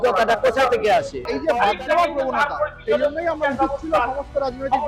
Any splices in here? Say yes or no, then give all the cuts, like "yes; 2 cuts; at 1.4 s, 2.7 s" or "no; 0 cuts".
yes; 1 cut; at 1.3 s